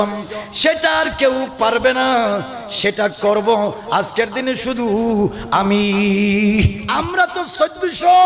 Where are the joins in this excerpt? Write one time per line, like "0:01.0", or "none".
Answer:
0:06.8